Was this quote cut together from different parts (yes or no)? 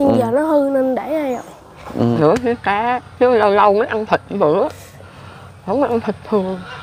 yes